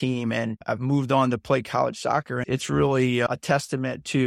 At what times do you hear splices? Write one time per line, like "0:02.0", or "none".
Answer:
0:02.4